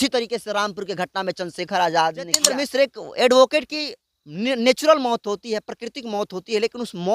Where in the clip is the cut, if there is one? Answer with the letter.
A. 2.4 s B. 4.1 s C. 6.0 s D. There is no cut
A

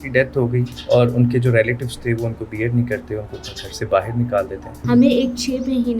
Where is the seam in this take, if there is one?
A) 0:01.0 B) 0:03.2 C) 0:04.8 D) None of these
C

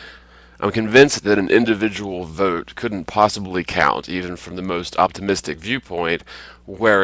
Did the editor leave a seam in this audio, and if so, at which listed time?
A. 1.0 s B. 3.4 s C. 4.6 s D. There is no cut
B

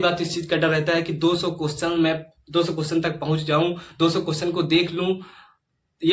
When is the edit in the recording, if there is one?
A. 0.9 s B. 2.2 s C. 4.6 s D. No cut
D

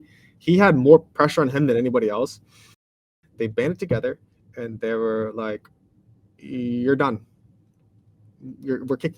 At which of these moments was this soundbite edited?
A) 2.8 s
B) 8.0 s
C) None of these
A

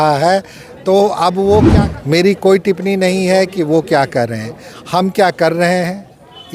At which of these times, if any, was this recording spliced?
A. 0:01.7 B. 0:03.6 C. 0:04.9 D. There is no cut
A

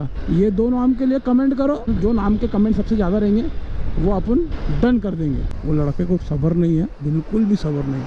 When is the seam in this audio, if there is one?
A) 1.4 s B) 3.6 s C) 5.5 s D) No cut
C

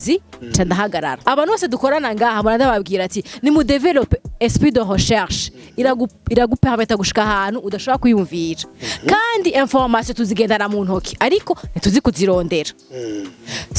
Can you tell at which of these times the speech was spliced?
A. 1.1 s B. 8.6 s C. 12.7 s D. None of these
A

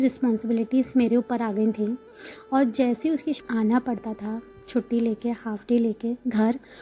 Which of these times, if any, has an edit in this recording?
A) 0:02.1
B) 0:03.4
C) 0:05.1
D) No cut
B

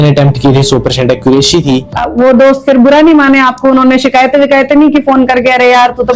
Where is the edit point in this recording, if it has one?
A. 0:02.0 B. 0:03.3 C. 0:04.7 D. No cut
A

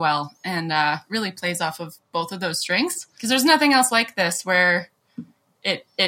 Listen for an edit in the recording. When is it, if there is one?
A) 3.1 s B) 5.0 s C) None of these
A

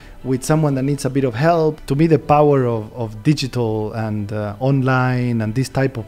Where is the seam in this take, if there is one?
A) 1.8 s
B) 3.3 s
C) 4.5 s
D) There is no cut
A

